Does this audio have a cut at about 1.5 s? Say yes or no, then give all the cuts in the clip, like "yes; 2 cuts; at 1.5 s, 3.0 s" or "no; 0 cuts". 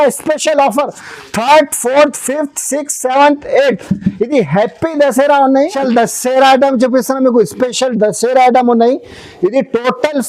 no; 1 cut; at 5.7 s